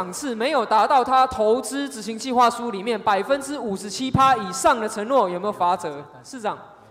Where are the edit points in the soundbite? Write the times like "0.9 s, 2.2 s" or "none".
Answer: none